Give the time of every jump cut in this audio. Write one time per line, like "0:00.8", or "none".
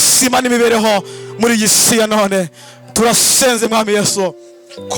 none

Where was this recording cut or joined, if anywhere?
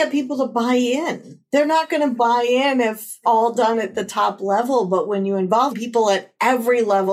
0:03.2
0:05.7

